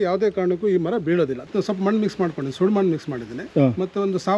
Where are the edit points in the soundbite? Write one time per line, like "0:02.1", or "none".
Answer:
0:01.4